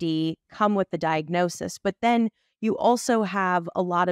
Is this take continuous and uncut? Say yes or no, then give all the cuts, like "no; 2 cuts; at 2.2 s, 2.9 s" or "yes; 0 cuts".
yes; 0 cuts